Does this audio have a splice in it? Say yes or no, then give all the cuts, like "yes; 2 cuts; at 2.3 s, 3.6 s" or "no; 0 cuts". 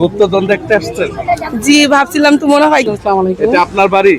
yes; 1 cut; at 2.9 s